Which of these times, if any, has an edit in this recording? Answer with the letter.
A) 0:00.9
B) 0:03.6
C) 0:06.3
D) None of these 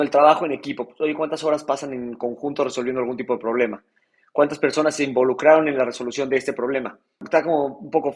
D